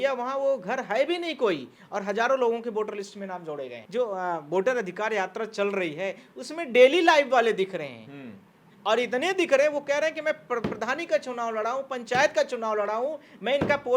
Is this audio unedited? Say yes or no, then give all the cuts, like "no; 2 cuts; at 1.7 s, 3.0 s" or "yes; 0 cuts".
no; 1 cut; at 3.8 s